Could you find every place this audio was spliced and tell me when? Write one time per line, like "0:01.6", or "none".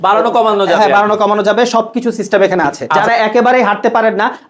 0:02.9